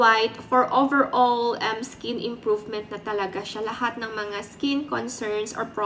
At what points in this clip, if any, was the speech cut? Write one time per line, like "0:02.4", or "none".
none